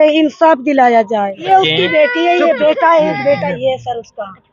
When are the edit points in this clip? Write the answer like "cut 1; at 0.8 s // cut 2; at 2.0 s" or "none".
cut 1; at 1.5 s